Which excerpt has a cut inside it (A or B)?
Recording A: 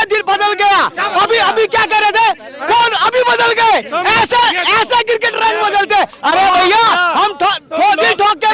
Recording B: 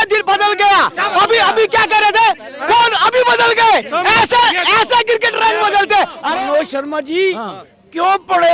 B